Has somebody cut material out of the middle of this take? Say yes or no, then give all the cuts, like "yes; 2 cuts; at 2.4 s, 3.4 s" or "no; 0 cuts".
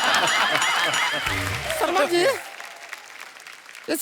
yes; 1 cut; at 1.6 s